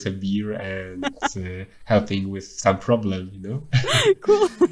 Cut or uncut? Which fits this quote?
cut